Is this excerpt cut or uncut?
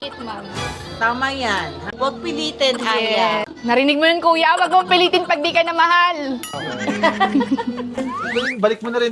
cut